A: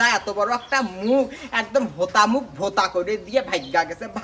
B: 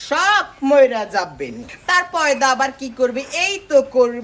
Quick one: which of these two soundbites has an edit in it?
B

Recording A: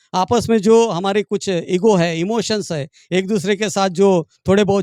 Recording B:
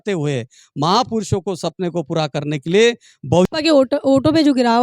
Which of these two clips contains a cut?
B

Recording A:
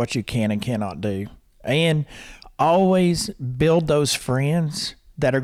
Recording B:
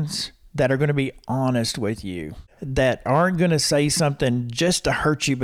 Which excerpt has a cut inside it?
B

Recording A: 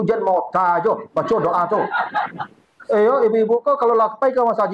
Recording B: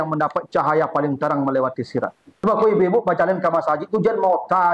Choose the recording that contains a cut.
B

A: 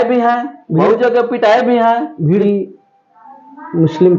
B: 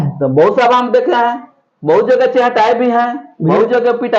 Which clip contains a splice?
A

